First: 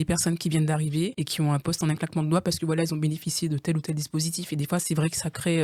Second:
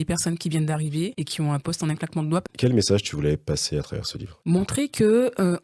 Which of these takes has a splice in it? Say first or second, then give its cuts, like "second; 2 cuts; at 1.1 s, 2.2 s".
second; 1 cut; at 2.4 s